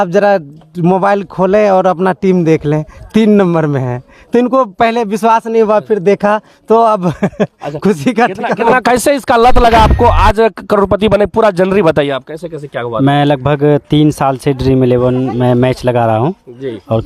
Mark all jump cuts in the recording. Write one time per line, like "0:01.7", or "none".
0:08.7